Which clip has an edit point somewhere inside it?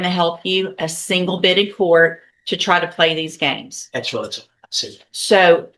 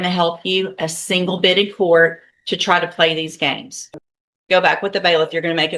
second; 1 cut; at 3.7 s

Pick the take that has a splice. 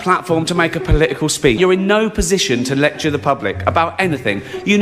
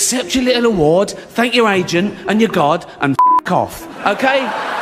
first; 1 cut; at 1.6 s

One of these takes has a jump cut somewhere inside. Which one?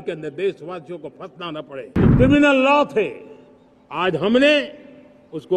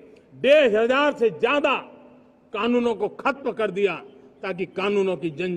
first; 1 cut; at 1.9 s

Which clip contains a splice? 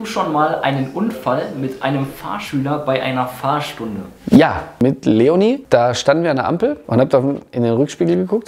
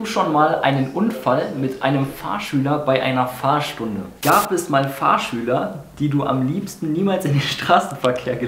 second; 1 cut; at 4.1 s

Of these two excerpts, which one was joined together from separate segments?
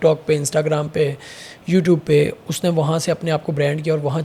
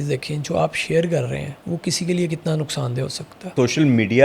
second; 2 cuts; at 1.5 s, 3.5 s

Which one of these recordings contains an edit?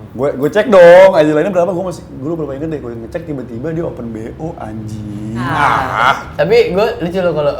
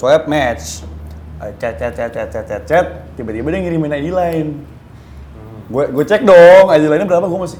first; 1 cut; at 5.5 s

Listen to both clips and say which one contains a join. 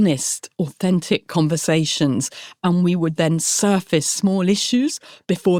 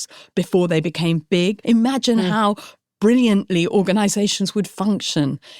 second; 1 cut; at 1.6 s

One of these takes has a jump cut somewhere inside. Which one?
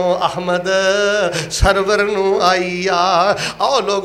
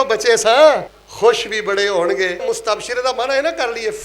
second; 2 cuts; at 1.0 s, 2.4 s

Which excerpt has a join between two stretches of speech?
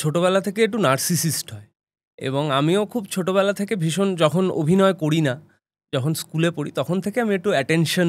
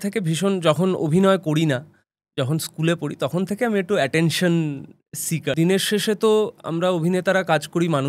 second; 1 cut; at 5.5 s

